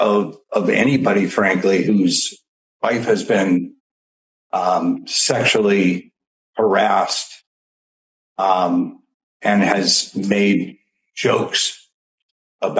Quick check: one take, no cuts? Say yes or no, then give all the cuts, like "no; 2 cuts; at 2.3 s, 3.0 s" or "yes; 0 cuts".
yes; 0 cuts